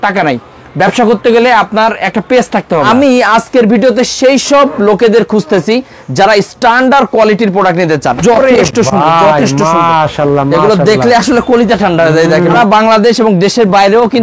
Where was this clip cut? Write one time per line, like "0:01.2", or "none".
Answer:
0:03.2
0:08.2
0:12.6